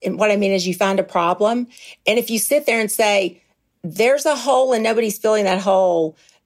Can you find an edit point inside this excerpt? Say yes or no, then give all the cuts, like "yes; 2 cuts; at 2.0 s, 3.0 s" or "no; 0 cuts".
no; 0 cuts